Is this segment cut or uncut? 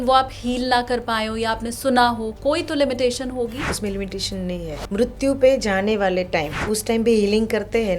cut